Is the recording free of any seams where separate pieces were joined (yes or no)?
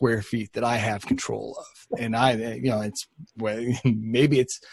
yes